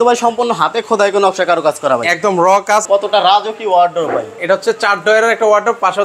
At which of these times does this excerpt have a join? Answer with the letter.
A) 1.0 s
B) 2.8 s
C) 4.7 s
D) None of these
B